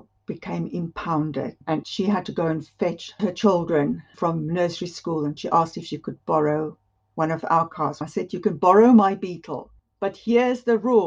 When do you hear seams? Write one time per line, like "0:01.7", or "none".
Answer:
0:01.8
0:05.4
0:08.0